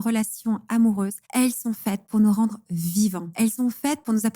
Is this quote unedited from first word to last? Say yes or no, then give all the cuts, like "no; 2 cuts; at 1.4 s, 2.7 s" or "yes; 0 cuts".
no; 2 cuts; at 1.2 s, 3.2 s